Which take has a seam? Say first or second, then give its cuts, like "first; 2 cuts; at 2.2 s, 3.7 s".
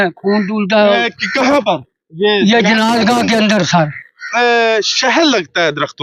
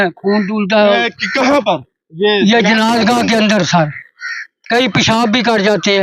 first; 1 cut; at 4.3 s